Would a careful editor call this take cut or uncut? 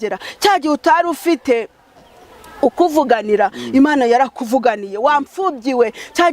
uncut